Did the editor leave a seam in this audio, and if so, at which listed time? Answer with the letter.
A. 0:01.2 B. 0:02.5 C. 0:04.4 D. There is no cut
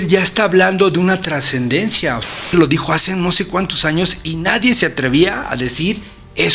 B